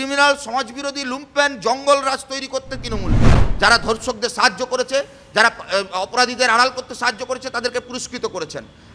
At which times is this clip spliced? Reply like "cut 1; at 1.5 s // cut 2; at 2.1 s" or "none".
cut 1; at 3.4 s